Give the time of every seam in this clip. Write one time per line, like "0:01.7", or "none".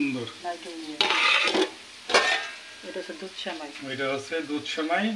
none